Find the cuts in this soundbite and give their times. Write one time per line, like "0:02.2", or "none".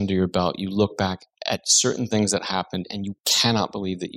none